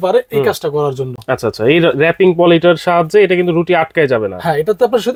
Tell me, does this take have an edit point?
no; 0 cuts

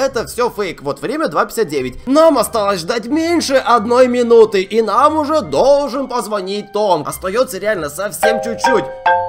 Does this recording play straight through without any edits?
no; 2 cuts; at 2.0 s, 7.0 s

